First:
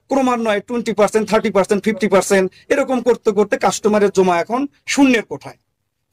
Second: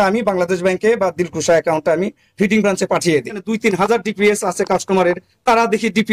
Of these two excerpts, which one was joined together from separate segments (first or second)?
second